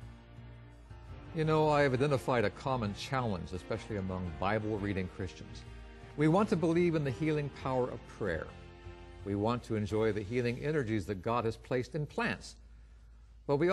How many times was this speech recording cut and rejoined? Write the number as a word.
one